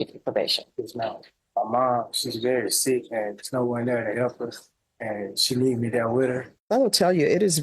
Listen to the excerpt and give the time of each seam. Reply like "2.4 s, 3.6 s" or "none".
1.3 s, 6.5 s

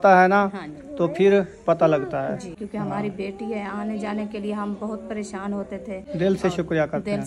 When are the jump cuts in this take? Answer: 2.6 s, 6.0 s

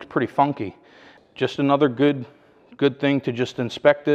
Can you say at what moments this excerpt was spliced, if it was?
1.1 s

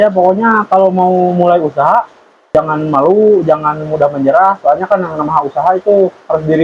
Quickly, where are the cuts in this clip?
2.5 s

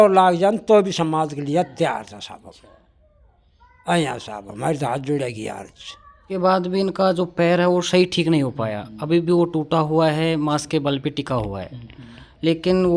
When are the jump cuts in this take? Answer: 6.3 s

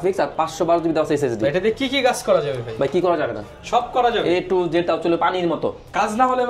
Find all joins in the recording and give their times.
none

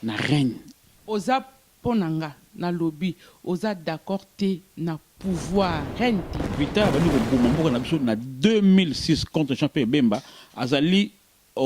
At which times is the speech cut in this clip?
6.4 s

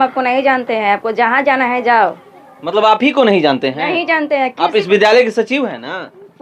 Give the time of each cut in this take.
none

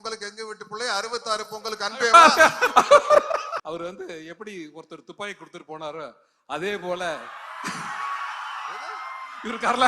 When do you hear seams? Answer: 3.6 s

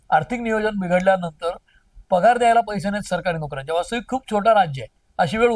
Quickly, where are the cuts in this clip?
none

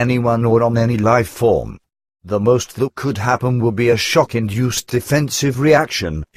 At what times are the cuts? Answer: none

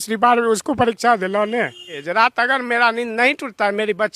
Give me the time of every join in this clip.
2.0 s

